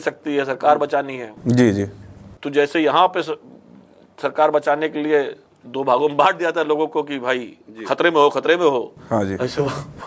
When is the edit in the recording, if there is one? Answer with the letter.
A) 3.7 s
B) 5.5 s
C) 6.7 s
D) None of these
D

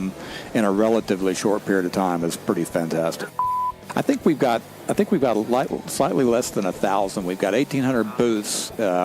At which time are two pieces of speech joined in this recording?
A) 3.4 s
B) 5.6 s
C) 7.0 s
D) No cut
A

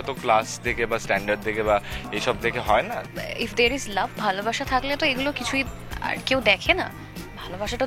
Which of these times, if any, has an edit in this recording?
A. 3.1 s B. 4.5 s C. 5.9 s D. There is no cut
A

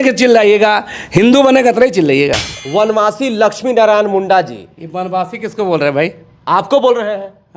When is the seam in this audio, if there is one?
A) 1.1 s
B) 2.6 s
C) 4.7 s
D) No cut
B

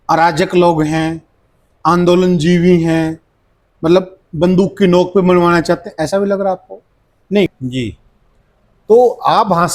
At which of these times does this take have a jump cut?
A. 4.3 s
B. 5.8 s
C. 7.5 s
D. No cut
C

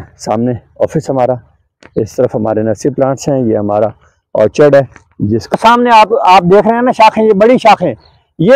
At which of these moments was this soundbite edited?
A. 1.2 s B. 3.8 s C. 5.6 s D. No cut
C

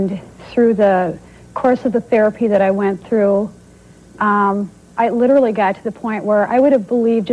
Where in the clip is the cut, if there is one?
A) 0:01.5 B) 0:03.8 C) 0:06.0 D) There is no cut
D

